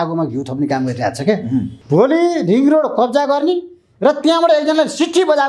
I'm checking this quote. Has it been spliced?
yes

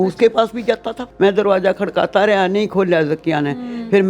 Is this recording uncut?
no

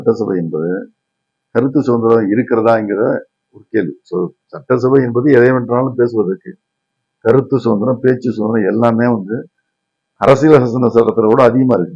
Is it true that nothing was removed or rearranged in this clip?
yes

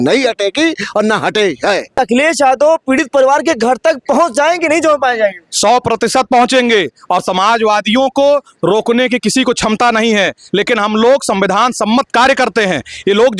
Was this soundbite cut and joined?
yes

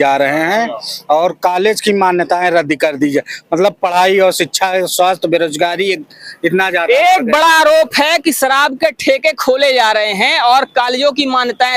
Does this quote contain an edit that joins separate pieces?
no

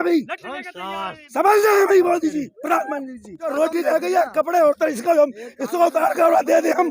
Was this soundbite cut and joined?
yes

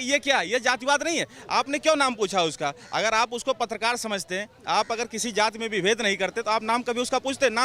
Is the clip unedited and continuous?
yes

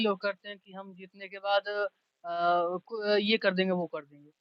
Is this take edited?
no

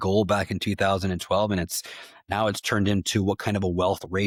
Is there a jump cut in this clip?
no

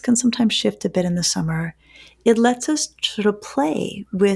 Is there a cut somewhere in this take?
no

